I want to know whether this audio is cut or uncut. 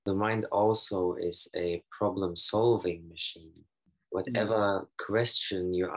uncut